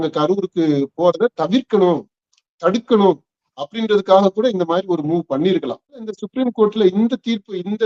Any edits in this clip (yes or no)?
yes